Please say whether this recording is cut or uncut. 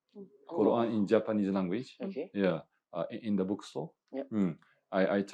uncut